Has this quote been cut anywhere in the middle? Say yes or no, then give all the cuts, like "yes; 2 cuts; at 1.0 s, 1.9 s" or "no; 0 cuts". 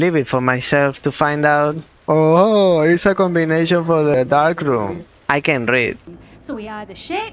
yes; 1 cut; at 6.1 s